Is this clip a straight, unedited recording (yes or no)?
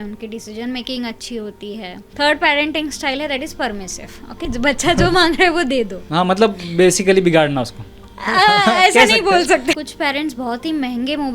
no